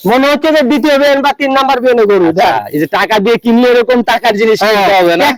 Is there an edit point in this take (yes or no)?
no